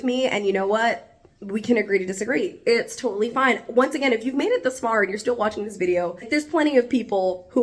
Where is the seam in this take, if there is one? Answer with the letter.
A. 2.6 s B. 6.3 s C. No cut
B